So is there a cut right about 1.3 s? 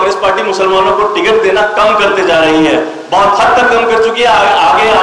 no; 0 cuts

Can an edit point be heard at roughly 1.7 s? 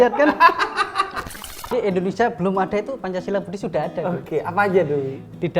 yes; 1 cut; at 1.7 s

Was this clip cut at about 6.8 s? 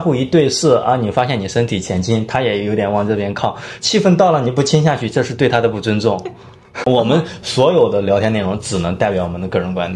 yes; 1 cut; at 6.8 s

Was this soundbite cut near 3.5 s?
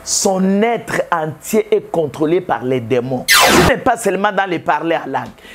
yes; 1 cut; at 3.5 s

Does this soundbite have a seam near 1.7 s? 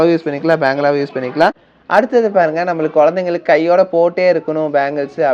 yes; 1 cut; at 1.7 s

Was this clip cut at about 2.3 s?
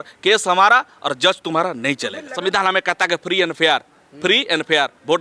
yes; 1 cut; at 2.3 s

